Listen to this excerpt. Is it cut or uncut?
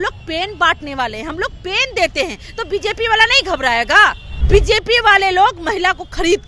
cut